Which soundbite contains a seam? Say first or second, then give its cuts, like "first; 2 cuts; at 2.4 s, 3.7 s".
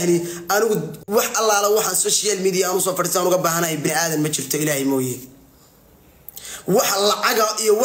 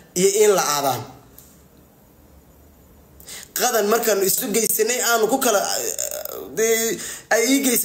second; 1 cut; at 4.4 s